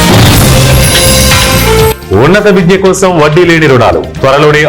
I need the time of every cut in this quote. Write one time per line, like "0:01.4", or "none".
0:02.0

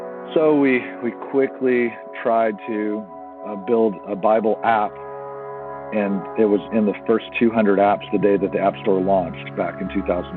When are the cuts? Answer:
0:05.5

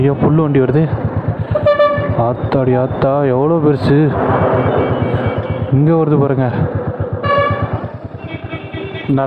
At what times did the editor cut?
none

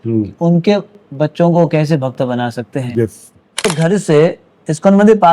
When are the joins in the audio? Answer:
0:03.7

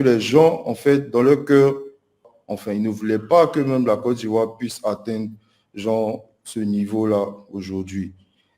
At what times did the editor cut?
0:02.2

